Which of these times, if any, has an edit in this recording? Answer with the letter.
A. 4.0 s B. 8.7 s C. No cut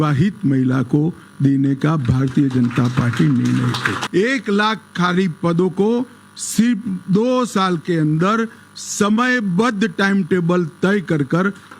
A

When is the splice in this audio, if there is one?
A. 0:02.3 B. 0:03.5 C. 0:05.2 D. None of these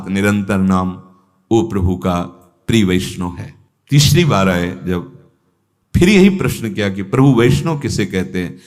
D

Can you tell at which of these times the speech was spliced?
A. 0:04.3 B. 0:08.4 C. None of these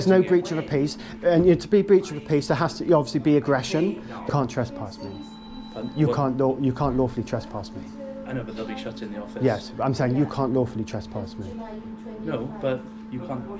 A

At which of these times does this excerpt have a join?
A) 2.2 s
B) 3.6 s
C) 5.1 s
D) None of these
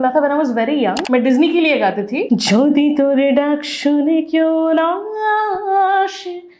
A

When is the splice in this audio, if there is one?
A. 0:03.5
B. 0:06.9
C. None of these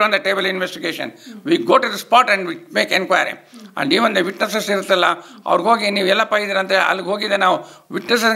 C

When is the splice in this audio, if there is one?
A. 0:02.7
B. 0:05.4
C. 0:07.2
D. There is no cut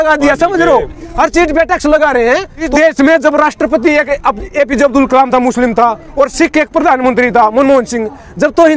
A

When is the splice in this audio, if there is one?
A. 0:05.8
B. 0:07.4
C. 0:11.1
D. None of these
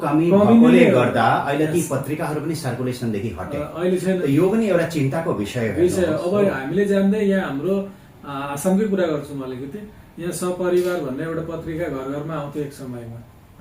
D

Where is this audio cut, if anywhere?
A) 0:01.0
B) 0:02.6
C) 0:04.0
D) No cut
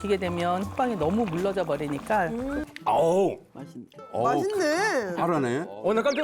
B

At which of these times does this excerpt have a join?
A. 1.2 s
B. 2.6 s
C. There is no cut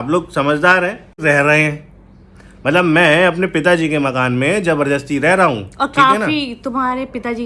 A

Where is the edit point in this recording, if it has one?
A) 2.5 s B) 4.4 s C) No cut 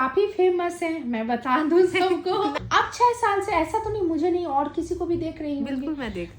A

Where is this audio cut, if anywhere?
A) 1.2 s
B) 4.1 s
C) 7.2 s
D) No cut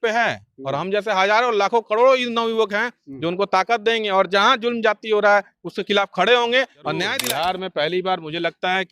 C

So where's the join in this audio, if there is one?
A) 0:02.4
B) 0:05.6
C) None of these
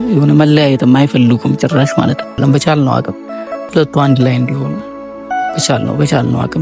A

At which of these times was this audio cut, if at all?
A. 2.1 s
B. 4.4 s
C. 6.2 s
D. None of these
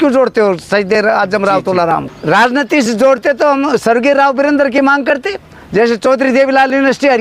A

